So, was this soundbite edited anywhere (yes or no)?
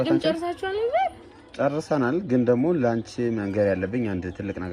no